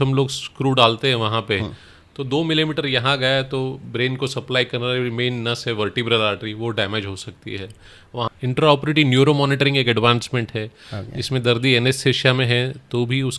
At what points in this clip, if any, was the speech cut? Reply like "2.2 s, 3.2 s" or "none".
8.3 s